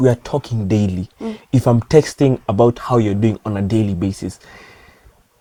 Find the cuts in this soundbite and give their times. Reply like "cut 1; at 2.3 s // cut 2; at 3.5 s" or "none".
none